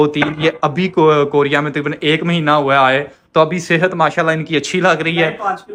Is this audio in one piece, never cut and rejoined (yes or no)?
yes